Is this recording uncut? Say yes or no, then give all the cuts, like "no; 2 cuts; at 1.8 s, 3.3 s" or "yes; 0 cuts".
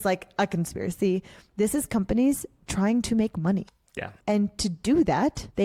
yes; 0 cuts